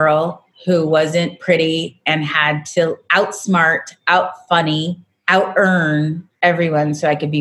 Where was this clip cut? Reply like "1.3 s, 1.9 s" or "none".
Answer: 5.1 s, 6.2 s